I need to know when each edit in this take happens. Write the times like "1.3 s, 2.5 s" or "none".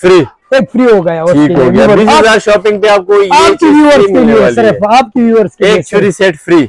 none